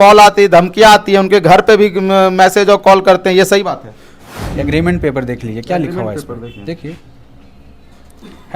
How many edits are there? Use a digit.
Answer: 1